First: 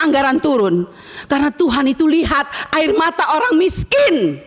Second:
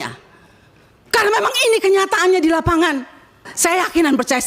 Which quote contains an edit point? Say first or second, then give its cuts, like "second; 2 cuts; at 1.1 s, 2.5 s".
second; 1 cut; at 3.5 s